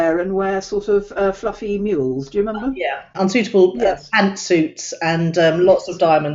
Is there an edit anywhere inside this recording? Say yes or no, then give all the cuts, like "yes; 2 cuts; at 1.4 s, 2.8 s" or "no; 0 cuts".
yes; 1 cut; at 3.1 s